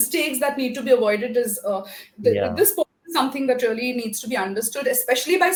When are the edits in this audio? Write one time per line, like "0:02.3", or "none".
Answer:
none